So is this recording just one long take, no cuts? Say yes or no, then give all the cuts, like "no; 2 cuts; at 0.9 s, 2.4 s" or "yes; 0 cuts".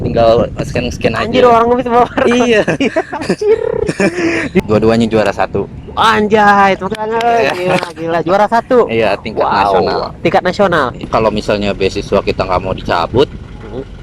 no; 2 cuts; at 4.6 s, 11.1 s